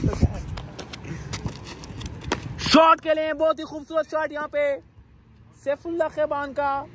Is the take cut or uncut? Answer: uncut